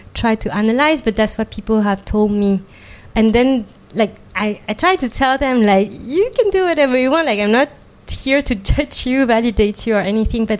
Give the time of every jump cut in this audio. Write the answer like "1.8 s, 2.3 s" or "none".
3.1 s